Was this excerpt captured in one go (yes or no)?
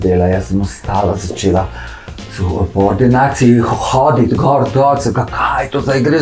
yes